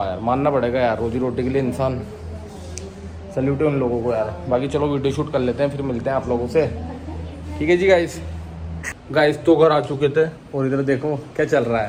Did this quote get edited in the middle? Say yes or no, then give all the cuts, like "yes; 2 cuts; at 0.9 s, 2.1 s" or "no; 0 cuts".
no; 0 cuts